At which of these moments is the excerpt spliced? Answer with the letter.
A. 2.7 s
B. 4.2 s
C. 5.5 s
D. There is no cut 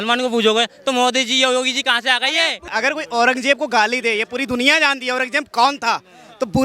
A